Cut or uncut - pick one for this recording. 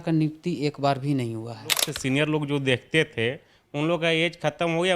cut